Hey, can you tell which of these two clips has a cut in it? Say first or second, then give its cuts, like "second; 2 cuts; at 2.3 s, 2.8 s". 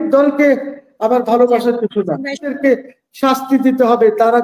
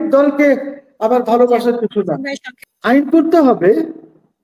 first; 1 cut; at 2.5 s